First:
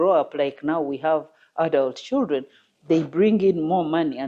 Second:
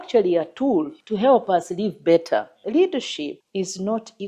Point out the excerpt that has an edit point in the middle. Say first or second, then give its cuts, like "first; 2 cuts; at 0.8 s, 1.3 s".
second; 3 cuts; at 1.0 s, 2.6 s, 3.4 s